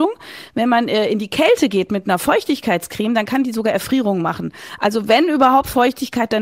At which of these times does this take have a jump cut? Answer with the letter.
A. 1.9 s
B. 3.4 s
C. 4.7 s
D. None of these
D